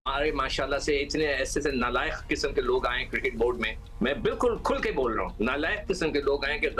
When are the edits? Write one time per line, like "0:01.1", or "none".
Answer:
none

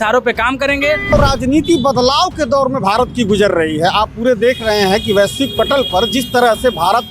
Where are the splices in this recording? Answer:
0:01.1

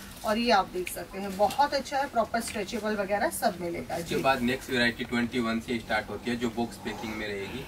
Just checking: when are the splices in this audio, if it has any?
none

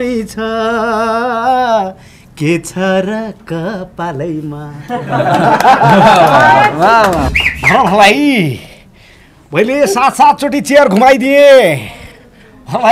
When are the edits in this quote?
0:07.3

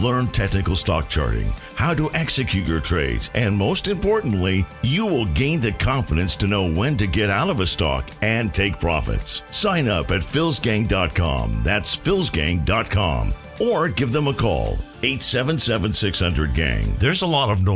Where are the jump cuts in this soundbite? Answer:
0:16.9

